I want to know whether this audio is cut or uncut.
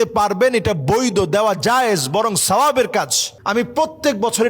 cut